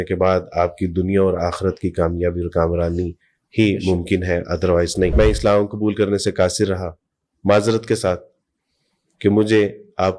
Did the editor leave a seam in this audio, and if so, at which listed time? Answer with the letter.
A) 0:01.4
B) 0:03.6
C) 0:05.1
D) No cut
C